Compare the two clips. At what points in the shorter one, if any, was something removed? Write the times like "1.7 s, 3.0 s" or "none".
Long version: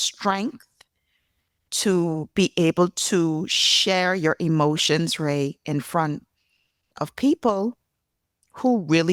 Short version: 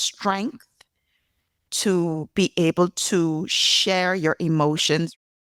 none